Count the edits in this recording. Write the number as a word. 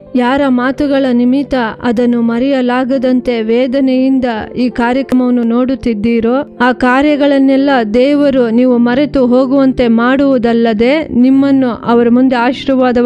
one